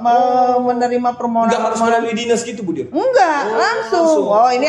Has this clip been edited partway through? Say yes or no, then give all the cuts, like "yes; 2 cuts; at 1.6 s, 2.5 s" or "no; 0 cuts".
no; 0 cuts